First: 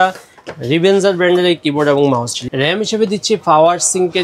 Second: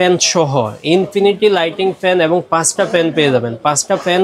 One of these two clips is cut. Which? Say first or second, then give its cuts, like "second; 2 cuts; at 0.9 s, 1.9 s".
first; 1 cut; at 2.3 s